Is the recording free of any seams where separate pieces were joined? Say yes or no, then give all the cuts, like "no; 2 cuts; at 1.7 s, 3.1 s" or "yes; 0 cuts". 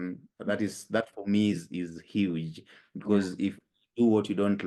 yes; 0 cuts